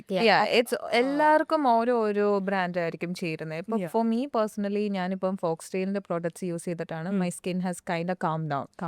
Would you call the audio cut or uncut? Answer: uncut